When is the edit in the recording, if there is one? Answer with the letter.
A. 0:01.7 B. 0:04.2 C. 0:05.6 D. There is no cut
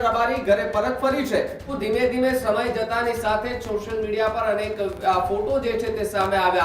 A